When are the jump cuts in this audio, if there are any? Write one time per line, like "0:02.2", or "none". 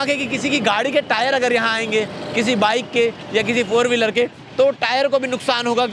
none

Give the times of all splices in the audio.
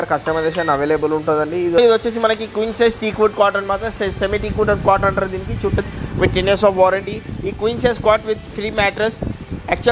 0:01.8
0:05.8

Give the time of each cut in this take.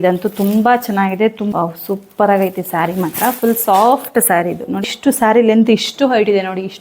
0:01.5
0:04.8

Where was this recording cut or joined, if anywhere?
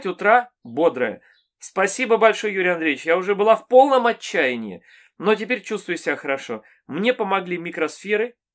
none

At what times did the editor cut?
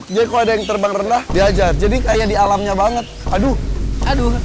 0:03.2

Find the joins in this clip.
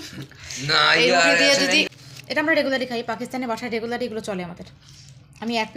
0:01.8

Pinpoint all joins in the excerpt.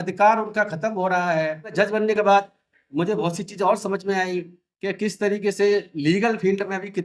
0:01.7

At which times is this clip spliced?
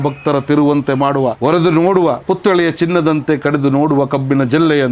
0:01.4
0:02.2

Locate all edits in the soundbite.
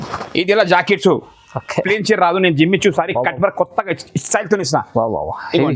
0:01.9

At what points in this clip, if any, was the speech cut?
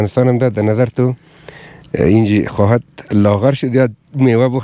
none

